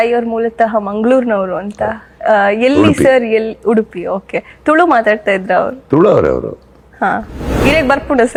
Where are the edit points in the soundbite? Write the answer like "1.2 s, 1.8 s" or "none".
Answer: none